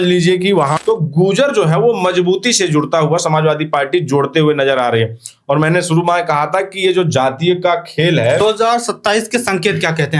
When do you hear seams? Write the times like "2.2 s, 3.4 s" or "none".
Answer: 0.8 s, 8.4 s

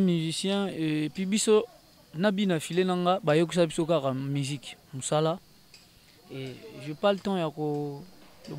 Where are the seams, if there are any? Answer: none

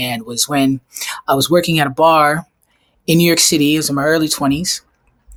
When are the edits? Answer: none

